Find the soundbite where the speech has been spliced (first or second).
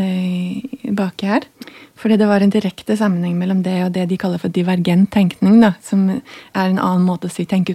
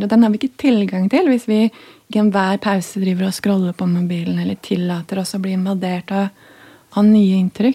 first